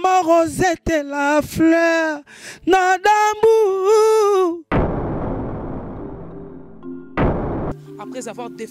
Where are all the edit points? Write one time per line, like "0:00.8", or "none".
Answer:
none